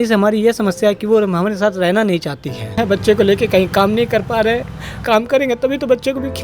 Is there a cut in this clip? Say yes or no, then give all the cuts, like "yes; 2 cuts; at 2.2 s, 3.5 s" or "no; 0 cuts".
yes; 2 cuts; at 2.8 s, 4.9 s